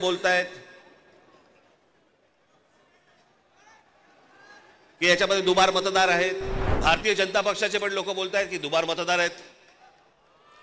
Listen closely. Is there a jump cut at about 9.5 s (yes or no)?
no